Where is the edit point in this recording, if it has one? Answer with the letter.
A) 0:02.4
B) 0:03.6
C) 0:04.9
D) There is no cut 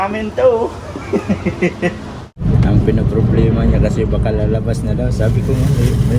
A